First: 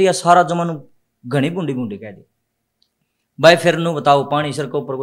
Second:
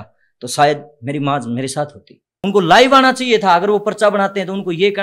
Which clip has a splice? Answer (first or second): second